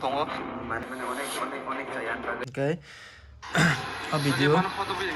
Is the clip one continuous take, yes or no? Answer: no